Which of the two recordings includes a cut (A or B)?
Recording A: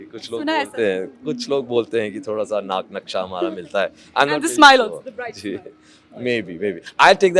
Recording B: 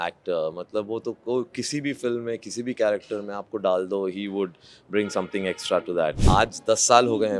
B